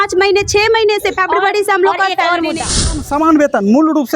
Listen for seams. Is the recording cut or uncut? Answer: cut